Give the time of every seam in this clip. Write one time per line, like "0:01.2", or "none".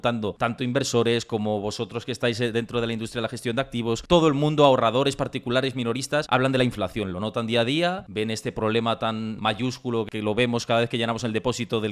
0:04.0
0:09.6